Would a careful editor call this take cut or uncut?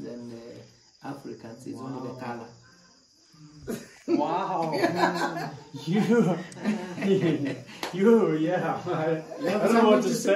uncut